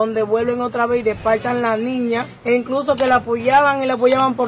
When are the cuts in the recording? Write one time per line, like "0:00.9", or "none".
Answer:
0:02.3